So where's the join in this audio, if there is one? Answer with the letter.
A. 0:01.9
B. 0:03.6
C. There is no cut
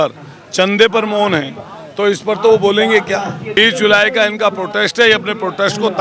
B